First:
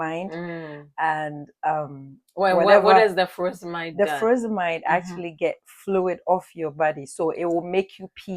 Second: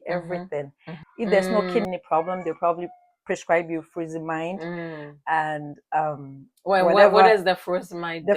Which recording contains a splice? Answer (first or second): second